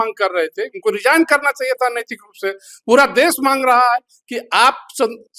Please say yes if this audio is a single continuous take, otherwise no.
yes